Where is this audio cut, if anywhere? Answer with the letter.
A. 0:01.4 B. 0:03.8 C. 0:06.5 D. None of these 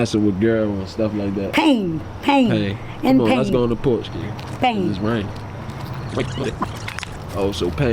D